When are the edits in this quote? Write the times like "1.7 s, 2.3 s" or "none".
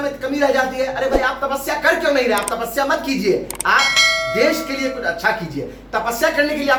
none